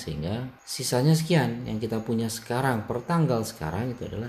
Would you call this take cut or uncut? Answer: uncut